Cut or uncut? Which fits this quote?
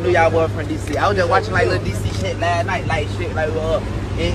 uncut